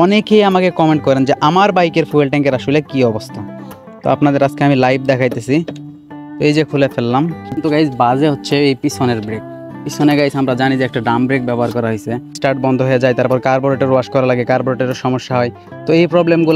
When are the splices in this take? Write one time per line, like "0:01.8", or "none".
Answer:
0:07.6
0:12.4